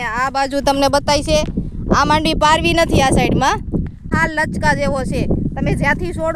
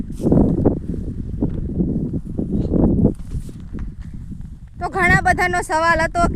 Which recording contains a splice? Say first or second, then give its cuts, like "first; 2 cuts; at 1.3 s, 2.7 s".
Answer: first; 1 cut; at 4.1 s